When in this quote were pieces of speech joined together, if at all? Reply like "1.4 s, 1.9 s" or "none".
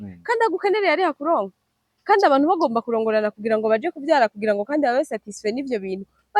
none